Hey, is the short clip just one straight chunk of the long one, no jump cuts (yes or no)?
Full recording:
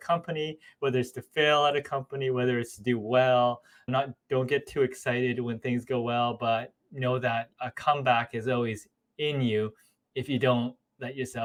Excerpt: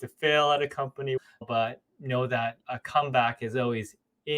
no